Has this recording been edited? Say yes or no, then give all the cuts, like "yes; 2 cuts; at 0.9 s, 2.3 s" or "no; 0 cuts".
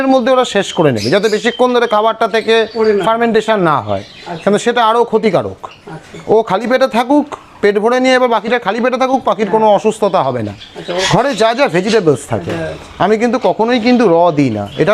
yes; 1 cut; at 11.0 s